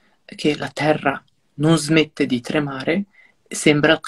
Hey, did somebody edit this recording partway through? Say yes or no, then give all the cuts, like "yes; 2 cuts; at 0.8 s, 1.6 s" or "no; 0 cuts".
no; 0 cuts